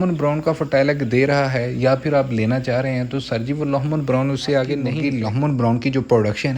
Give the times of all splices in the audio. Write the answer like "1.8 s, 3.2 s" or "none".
4.9 s